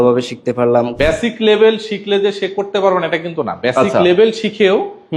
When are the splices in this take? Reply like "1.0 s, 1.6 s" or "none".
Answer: 0.9 s